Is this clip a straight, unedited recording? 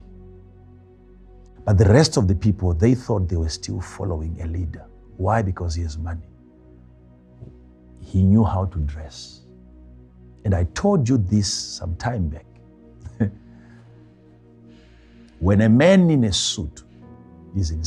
yes; 0 cuts

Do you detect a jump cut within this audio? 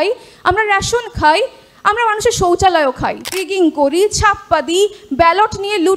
yes; 1 cut; at 3.4 s

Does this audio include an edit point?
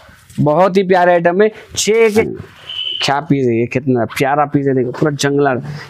yes; 1 cut; at 2.3 s

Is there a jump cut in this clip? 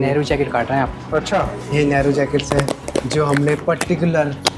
no; 0 cuts

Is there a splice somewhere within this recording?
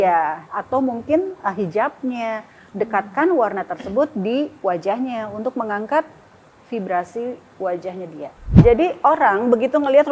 yes; 1 cut; at 8.4 s

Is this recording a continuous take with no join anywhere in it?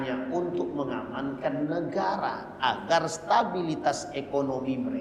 yes; 0 cuts

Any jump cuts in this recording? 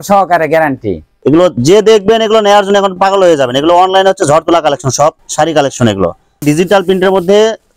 yes; 2 cuts; at 1.1 s, 6.3 s

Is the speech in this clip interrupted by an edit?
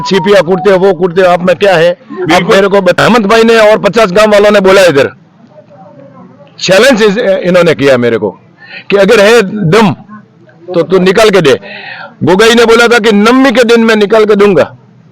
yes; 1 cut; at 3.0 s

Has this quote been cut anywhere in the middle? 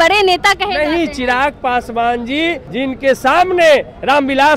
yes; 1 cut; at 2.6 s

